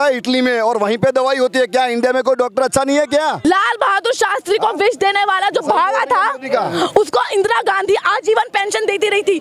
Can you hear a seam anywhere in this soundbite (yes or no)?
yes